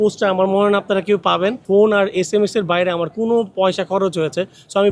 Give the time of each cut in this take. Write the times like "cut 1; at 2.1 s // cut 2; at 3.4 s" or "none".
cut 1; at 1.6 s